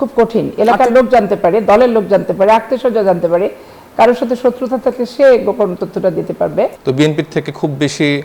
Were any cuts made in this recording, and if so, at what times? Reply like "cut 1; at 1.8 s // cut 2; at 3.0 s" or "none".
cut 1; at 6.7 s